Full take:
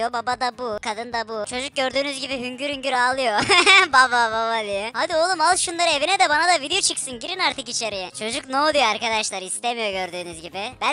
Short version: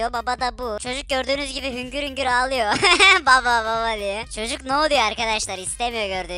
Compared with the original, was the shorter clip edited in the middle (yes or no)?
yes